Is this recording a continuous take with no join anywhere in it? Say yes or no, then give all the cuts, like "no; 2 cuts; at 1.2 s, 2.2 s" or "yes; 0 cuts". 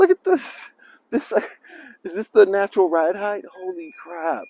yes; 0 cuts